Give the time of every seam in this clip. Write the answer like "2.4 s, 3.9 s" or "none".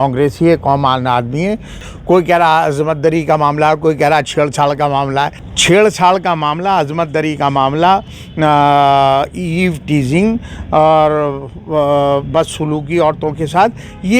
1.8 s, 5.5 s